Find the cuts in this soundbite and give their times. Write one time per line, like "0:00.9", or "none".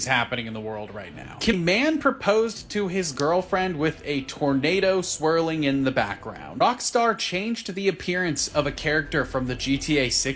0:01.5
0:06.5